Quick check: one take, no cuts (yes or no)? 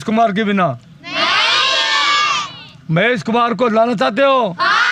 yes